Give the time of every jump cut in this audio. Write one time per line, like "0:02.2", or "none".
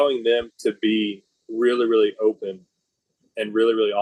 none